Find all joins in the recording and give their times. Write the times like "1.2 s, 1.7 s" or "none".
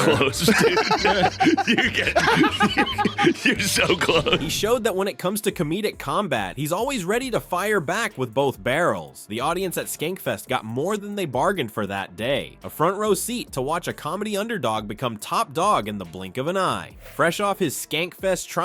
none